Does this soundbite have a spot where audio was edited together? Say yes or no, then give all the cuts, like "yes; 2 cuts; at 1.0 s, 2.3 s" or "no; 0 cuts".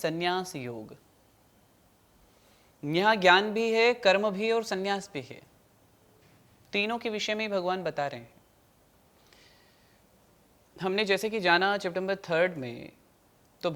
no; 0 cuts